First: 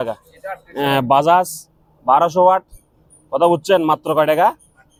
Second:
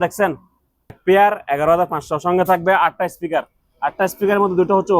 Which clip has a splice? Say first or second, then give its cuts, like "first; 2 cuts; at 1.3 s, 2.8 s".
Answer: second; 1 cut; at 1.0 s